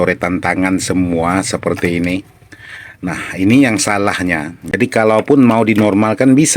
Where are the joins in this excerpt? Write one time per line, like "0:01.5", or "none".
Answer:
0:04.8